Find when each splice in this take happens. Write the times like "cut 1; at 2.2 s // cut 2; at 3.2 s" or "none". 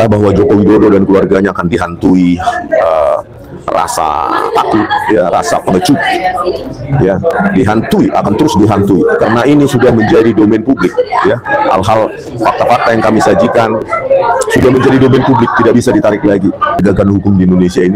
cut 1; at 16.8 s